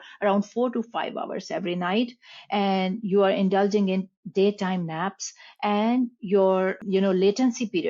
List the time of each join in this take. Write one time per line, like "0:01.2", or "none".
0:06.8